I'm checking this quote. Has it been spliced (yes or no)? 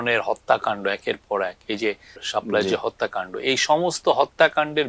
yes